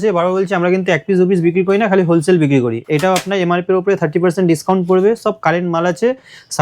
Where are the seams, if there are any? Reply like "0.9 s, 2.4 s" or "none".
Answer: 2.8 s

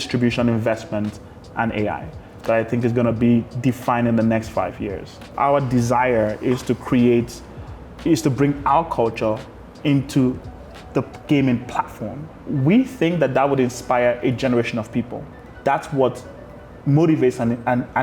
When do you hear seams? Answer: 5.3 s, 12.4 s, 15.5 s

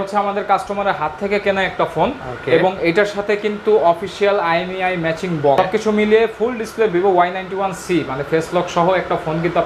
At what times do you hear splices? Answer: 5.6 s

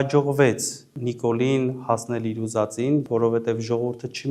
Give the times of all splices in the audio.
0.9 s, 3.0 s

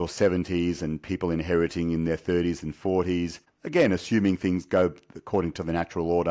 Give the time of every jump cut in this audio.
none

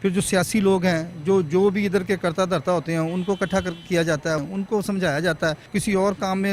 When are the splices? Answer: 4.4 s, 5.7 s

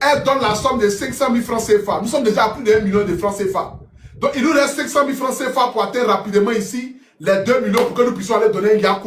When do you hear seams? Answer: none

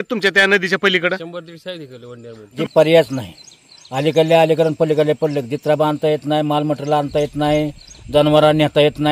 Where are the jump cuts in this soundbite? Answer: 2.4 s

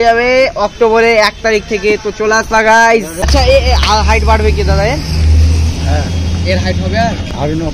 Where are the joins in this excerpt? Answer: 3.2 s

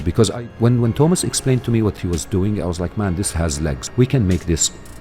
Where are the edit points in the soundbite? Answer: 2.0 s, 3.8 s

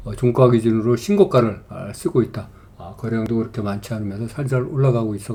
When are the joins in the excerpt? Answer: none

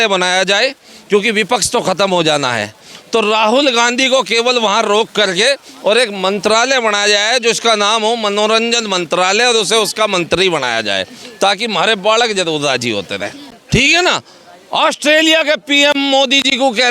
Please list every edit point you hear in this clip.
13.5 s

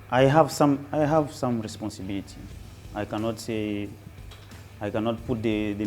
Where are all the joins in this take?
none

